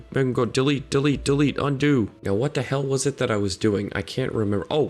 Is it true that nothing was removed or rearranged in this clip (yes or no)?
no